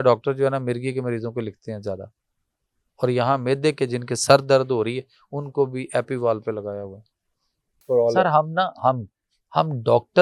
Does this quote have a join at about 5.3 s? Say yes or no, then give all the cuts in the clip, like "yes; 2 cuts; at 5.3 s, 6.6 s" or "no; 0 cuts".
no; 1 cut; at 7.8 s